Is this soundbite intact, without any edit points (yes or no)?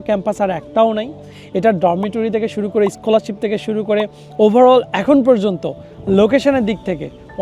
yes